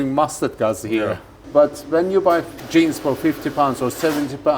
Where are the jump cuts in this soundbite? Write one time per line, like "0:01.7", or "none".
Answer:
0:01.4